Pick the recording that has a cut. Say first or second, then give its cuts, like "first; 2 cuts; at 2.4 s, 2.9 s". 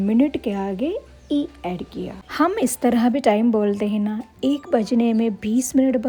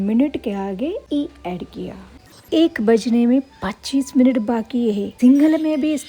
second; 3 cuts; at 1.0 s, 2.0 s, 5.1 s